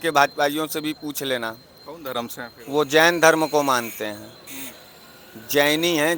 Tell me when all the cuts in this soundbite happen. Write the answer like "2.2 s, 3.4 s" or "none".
none

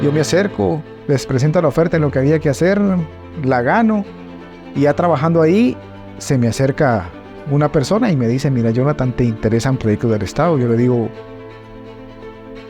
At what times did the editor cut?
0.9 s

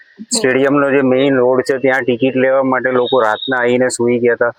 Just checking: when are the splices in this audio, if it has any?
none

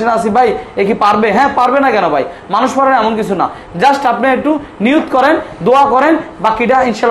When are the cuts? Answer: none

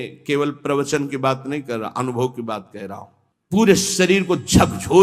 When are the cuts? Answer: none

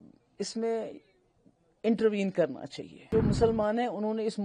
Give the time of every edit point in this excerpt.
3.1 s

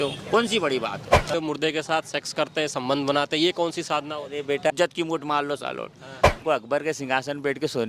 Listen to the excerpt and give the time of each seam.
1.3 s, 4.7 s, 6.4 s

